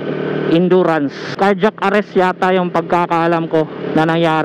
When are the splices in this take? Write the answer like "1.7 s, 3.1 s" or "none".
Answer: 1.3 s